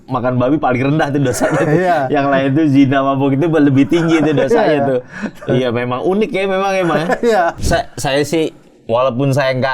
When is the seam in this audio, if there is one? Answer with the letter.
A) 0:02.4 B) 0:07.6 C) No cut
B